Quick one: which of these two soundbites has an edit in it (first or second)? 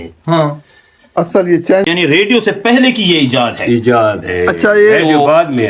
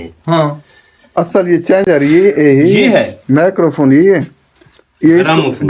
first